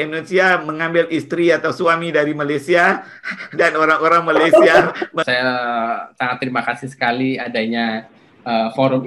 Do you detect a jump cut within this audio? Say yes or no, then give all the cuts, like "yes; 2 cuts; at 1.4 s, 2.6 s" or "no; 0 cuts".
yes; 1 cut; at 5.2 s